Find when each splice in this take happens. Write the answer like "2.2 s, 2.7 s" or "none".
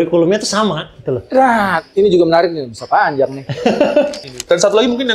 4.2 s

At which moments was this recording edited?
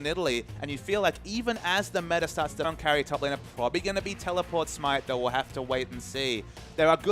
none

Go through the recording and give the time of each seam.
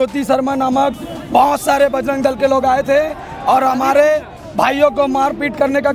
none

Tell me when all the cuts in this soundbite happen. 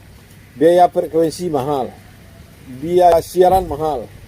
3.1 s

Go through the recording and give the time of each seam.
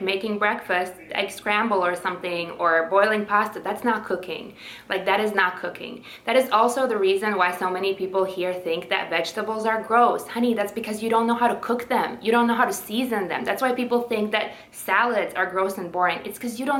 none

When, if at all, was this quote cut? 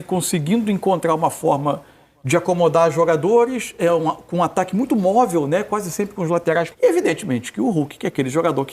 6.7 s

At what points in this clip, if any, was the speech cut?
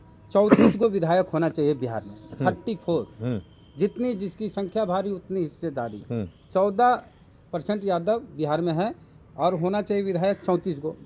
none

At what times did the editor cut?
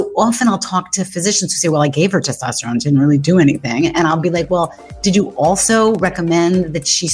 none

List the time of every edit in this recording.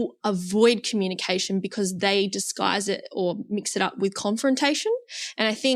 none

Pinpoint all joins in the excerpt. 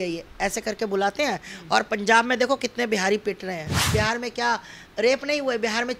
3.9 s

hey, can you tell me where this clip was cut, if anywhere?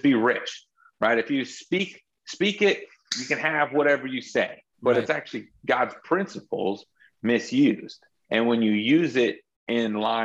4.6 s, 8.1 s

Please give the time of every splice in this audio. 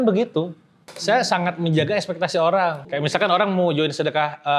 0.9 s, 2.8 s

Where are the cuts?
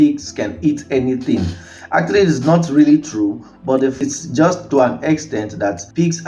none

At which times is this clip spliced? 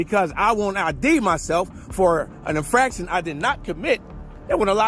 none

